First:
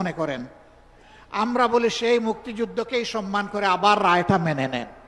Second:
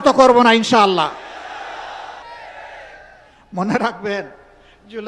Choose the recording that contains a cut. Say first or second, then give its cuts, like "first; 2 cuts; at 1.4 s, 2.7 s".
second; 1 cut; at 2.2 s